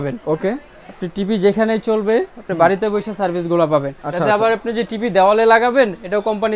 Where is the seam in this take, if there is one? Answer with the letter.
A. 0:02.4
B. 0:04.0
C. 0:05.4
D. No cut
B